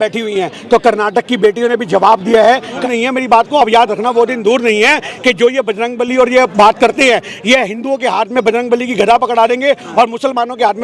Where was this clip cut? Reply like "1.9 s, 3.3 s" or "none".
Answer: 2.7 s